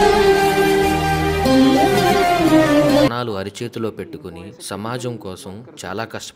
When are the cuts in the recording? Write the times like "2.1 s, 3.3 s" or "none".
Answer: 3.1 s